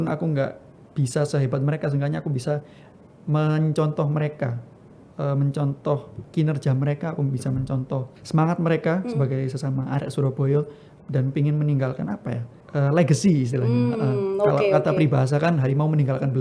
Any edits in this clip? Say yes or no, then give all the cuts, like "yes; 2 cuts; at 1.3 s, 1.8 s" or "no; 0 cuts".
yes; 3 cuts; at 6.2 s, 8.2 s, 12.5 s